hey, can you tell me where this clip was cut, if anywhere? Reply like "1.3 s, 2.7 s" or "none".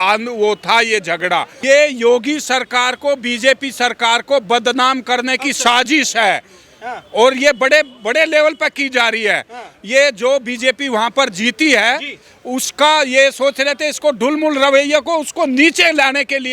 1.5 s